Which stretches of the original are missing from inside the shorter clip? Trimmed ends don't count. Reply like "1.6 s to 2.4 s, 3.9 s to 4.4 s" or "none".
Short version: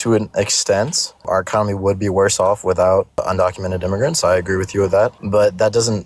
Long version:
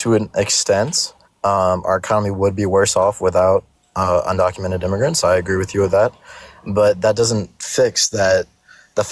1.2 s to 1.8 s, 3.8 s to 4.2 s, 6.2 s to 6.6 s

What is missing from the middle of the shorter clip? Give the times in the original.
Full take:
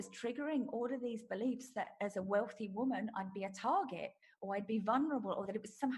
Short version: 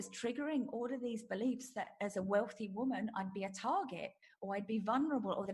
none

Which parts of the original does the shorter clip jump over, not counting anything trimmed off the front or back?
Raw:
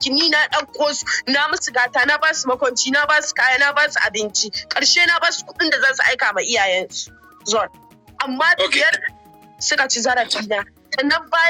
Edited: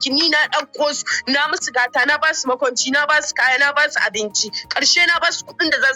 none

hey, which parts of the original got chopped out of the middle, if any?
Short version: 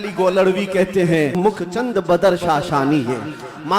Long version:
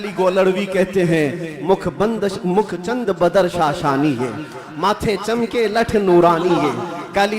1.3 s to 2.5 s

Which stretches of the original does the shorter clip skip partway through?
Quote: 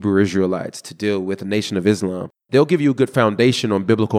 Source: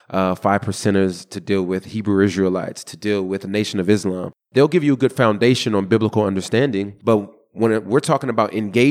none

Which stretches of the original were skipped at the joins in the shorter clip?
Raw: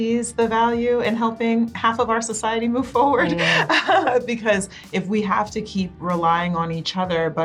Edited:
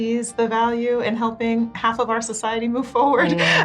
none

